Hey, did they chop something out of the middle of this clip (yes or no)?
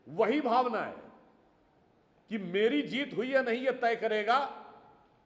no